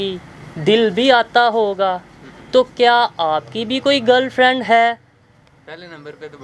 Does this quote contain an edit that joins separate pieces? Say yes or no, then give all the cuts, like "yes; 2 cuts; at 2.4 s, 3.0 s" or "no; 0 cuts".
no; 0 cuts